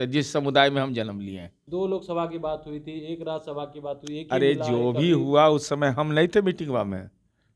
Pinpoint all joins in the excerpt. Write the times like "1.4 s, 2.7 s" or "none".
1.6 s